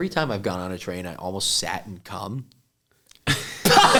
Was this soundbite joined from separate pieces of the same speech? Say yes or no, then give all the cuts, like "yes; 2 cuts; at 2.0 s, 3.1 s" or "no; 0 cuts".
no; 0 cuts